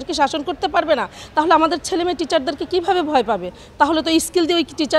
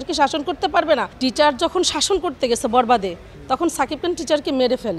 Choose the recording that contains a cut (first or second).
second